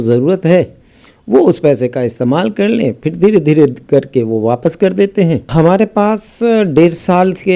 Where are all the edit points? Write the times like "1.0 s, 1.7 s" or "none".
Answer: 5.5 s